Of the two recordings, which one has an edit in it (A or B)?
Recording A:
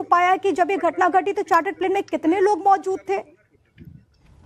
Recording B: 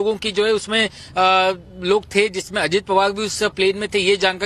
A